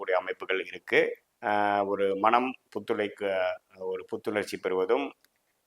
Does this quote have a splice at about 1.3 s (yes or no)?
yes